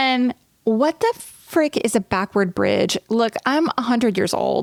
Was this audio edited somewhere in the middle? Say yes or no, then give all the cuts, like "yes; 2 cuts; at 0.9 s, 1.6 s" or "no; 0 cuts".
no; 0 cuts